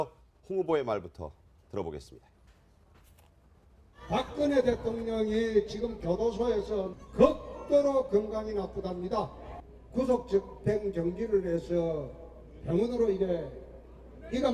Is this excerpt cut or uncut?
uncut